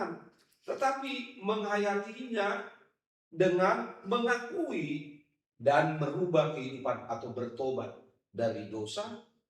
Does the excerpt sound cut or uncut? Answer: uncut